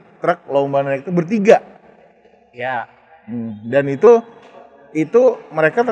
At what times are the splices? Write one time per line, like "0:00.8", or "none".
none